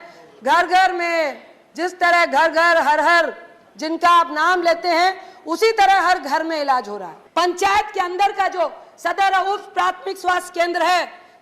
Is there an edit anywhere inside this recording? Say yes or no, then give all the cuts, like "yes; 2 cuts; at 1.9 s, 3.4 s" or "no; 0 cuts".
yes; 1 cut; at 7.1 s